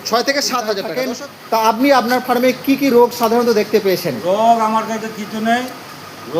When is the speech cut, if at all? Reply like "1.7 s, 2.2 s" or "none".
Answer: 1.0 s